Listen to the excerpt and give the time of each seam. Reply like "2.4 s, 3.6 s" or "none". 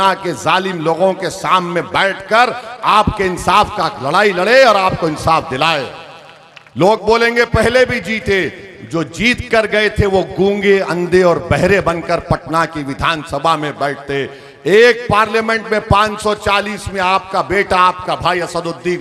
none